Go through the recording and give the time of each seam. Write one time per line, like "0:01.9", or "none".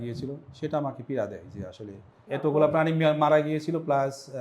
0:02.3